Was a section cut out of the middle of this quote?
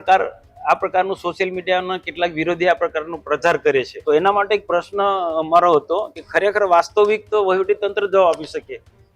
yes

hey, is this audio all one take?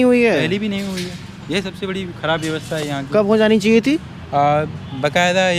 yes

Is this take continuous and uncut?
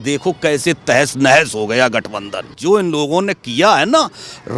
no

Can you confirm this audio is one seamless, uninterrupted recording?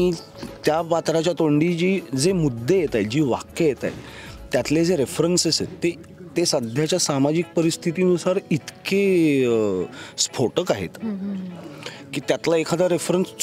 yes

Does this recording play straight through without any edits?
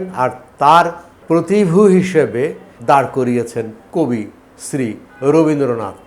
no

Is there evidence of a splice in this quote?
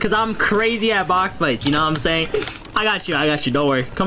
yes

